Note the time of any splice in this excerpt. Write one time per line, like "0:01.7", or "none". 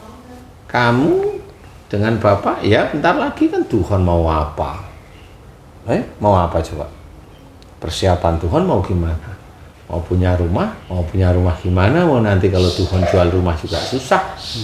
none